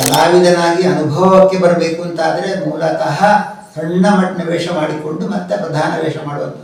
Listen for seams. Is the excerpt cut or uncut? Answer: uncut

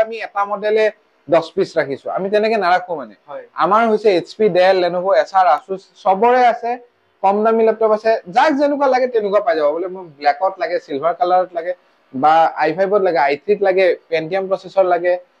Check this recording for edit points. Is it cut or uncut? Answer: uncut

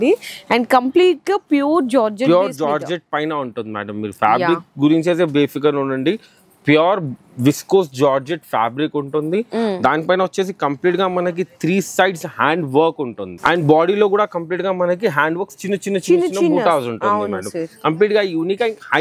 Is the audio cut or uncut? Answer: uncut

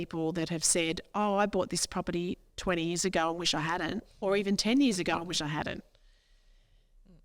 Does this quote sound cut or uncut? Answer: uncut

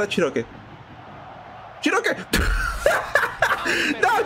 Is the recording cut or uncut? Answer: uncut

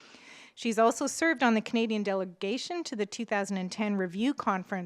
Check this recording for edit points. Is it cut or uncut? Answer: uncut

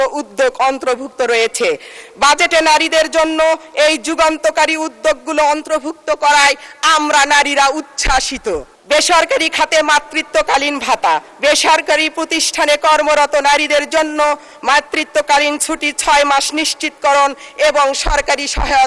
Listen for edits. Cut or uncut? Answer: cut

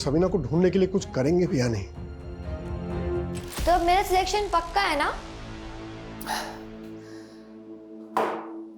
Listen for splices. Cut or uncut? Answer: cut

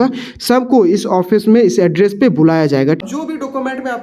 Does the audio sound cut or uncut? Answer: cut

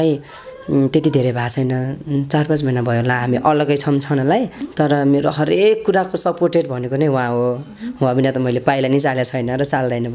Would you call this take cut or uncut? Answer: cut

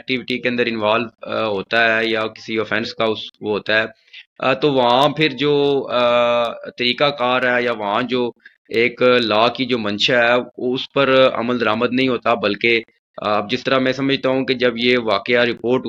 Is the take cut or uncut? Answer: uncut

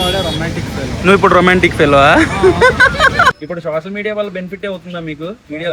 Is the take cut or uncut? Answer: cut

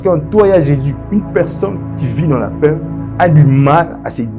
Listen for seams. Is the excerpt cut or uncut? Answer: cut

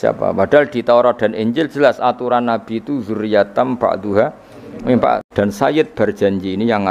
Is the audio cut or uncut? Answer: cut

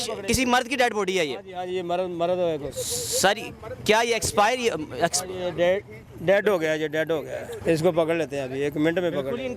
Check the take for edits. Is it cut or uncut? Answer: cut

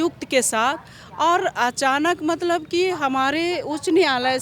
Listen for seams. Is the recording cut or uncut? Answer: uncut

